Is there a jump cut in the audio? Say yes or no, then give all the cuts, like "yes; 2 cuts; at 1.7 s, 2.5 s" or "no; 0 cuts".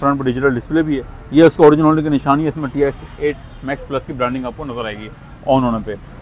no; 0 cuts